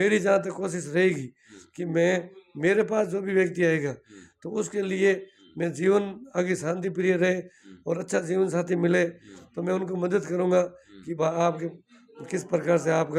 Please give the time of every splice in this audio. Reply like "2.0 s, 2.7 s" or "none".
none